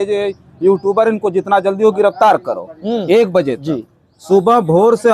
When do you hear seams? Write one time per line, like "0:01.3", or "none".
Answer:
none